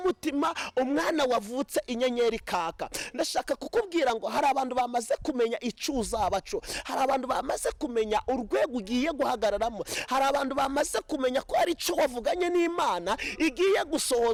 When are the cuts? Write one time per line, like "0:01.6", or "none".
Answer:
none